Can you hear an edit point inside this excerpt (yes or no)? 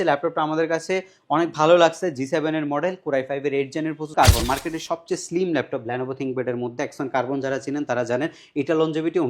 yes